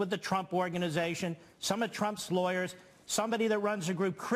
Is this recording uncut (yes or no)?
no